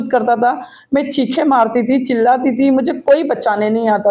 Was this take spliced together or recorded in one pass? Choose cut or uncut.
uncut